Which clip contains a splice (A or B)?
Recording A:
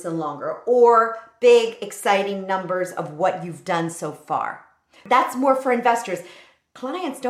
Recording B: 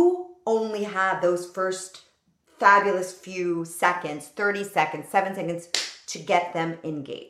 A